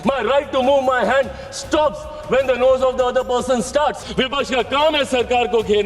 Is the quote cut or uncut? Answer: cut